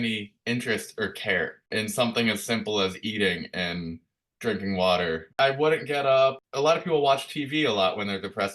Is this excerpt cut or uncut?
cut